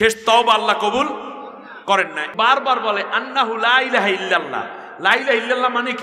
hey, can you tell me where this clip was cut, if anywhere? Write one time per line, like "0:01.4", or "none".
0:02.3